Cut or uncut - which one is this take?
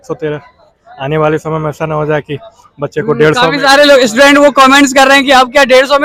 uncut